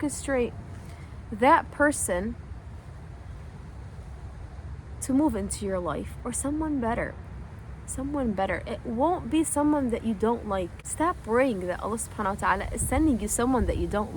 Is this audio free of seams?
yes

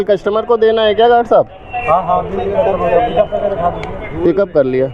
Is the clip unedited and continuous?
yes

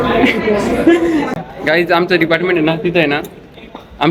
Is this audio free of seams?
no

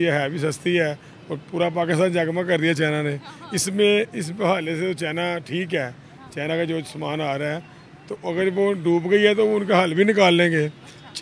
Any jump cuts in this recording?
no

